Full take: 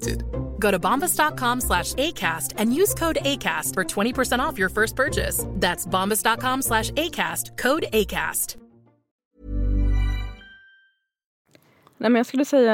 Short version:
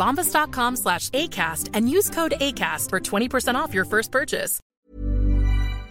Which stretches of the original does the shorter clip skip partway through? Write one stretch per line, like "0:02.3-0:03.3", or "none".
0:05.4-0:09.0